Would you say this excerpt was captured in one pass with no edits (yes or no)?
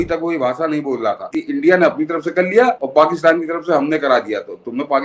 no